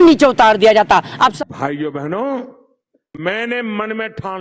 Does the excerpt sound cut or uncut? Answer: cut